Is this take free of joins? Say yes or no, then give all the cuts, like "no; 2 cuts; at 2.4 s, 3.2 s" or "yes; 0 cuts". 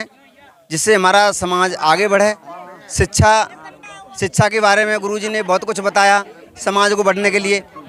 yes; 0 cuts